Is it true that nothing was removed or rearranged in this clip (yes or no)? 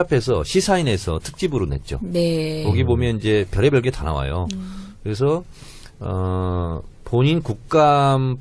no